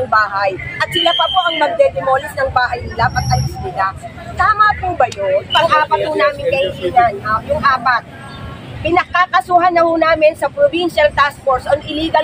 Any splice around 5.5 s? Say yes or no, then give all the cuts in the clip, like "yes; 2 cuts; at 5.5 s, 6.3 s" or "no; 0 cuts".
yes; 1 cut; at 5.5 s